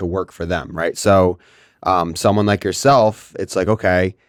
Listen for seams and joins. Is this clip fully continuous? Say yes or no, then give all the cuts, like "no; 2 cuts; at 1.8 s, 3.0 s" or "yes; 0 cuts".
yes; 0 cuts